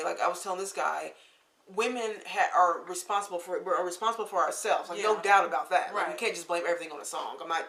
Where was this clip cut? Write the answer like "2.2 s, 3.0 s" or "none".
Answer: none